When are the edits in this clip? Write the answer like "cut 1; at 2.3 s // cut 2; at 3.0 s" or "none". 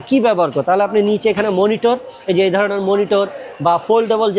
none